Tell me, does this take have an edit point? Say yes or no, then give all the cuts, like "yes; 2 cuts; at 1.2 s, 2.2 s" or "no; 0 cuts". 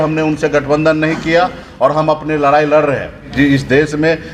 yes; 1 cut; at 3.3 s